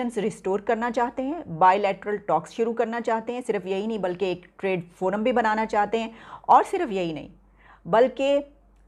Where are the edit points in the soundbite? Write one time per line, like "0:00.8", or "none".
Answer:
none